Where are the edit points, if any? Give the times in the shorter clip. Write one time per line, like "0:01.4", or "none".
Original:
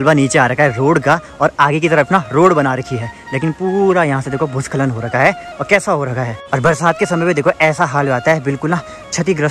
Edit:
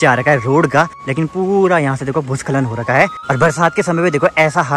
0:01.0
0:03.2